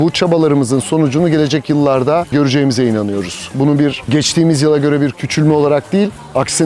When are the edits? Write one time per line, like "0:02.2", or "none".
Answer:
none